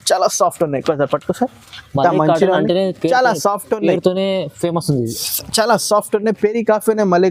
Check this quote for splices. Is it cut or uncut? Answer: uncut